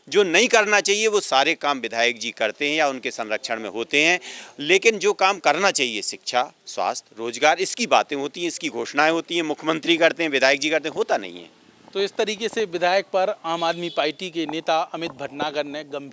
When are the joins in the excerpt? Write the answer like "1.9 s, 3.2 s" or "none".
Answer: none